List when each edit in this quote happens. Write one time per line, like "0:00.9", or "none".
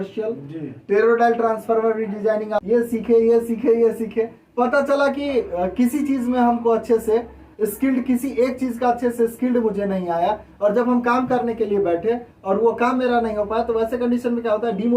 0:02.6